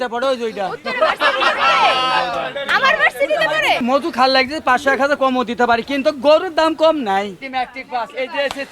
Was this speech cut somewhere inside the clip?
yes; 2 cuts; at 3.8 s, 7.4 s

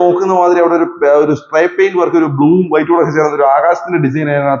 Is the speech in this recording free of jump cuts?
yes; 0 cuts

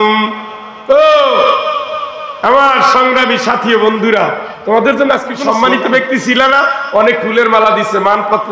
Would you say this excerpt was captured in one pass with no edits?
no; 1 cut; at 5.4 s

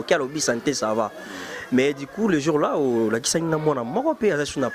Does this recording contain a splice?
no; 0 cuts

